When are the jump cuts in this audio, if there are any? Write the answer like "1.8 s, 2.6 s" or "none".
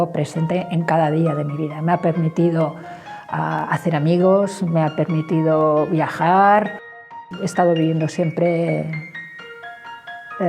7.0 s